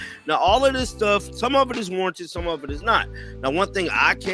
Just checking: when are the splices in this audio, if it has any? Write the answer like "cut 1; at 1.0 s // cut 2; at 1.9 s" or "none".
none